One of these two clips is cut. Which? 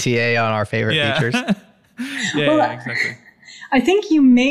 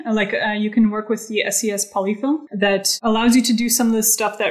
second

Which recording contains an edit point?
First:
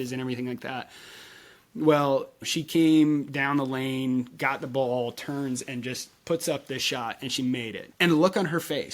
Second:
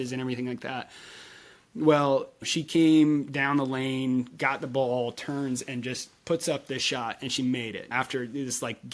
first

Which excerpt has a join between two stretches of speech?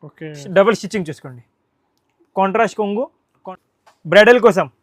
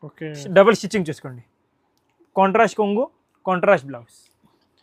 first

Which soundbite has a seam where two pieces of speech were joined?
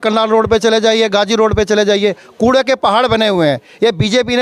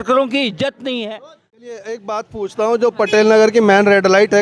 second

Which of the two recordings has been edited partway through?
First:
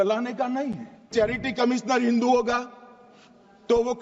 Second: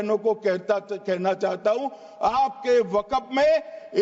first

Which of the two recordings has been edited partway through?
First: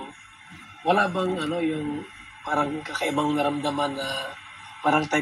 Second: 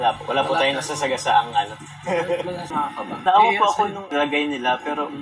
second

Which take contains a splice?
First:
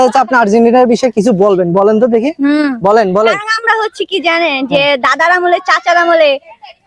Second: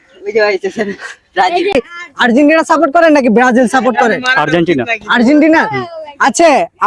second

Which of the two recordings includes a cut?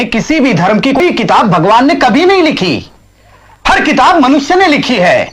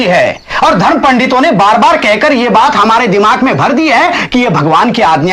first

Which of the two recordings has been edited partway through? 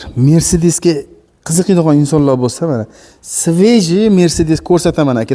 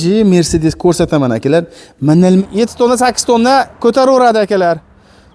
second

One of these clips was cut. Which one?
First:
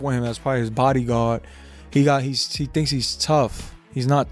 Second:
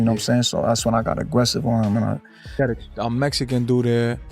second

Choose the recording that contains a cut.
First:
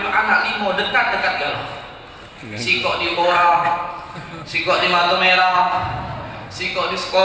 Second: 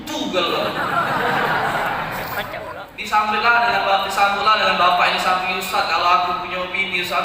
second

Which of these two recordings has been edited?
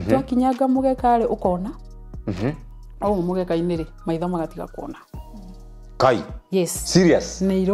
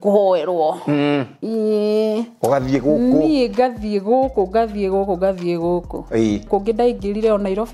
second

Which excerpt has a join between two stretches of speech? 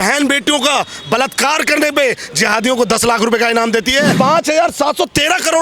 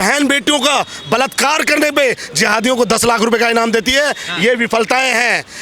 first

